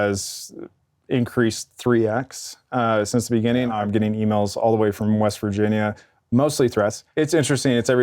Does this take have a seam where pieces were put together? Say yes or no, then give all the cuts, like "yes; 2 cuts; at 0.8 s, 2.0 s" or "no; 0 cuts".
yes; 2 cuts; at 3.7 s, 7.0 s